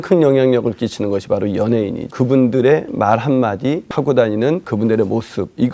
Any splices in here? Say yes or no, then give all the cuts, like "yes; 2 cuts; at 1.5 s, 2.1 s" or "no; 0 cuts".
yes; 3 cuts; at 2.1 s, 3.9 s, 4.7 s